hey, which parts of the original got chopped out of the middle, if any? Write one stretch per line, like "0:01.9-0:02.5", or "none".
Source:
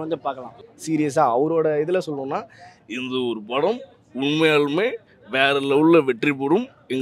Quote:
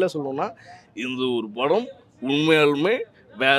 none